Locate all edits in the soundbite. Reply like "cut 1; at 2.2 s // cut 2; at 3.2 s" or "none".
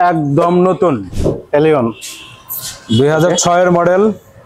cut 1; at 1.1 s